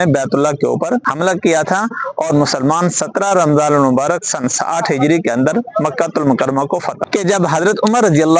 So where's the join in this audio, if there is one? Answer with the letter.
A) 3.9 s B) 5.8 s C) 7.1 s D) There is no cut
C